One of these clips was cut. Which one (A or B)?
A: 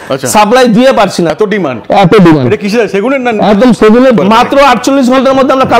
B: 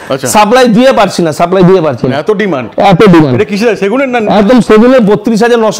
A